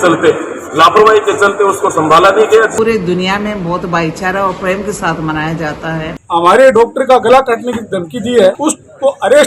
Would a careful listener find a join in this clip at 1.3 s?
no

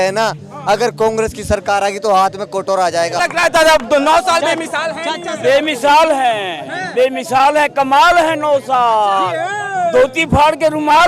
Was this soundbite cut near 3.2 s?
yes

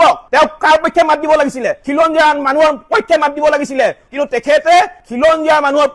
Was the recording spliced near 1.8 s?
yes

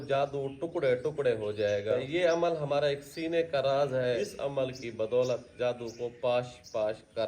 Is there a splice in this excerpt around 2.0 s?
yes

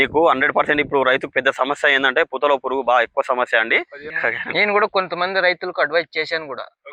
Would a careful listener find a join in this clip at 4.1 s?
yes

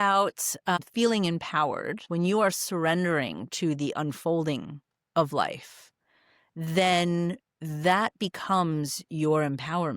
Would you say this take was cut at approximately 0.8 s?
yes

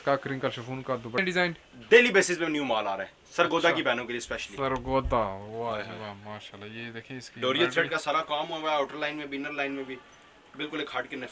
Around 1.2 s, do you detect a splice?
yes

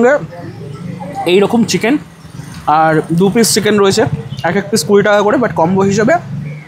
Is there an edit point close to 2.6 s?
no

